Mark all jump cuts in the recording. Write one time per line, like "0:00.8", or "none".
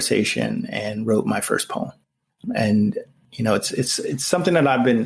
0:02.3
0:03.1